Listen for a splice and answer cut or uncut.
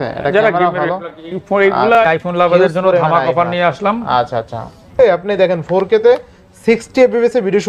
cut